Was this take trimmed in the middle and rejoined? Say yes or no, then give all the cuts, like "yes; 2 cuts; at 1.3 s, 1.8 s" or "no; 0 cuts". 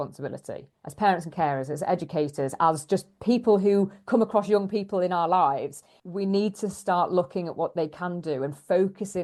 no; 0 cuts